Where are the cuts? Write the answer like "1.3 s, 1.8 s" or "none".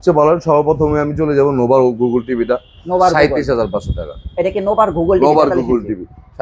none